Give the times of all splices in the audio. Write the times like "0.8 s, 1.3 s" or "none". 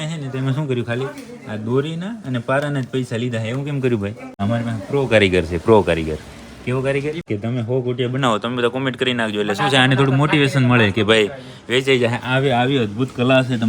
4.2 s, 7.2 s